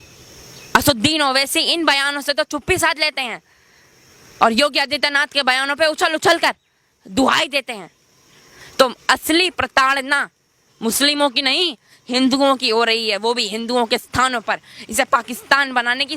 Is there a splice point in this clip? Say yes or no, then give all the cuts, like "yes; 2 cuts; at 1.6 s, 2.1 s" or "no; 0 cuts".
no; 0 cuts